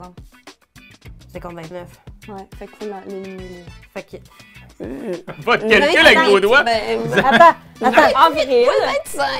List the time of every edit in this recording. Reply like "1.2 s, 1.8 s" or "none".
none